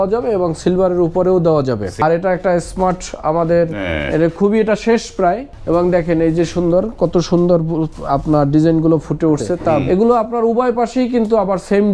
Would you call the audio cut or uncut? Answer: cut